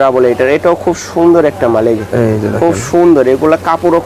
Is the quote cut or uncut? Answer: uncut